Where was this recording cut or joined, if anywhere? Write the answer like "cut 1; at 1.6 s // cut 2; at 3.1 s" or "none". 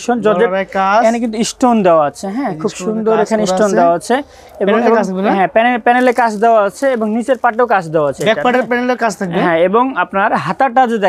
none